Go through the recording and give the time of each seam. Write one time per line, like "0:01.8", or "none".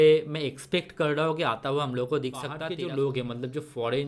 0:02.6